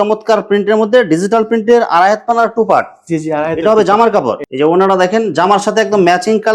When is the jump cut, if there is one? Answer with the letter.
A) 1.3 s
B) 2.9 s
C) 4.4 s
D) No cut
C